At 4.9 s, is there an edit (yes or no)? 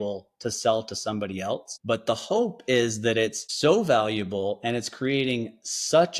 no